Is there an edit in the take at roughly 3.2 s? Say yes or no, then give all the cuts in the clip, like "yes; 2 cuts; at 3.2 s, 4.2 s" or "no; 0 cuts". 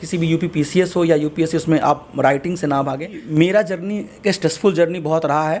yes; 1 cut; at 3.2 s